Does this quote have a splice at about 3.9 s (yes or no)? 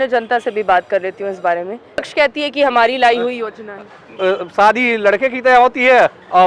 no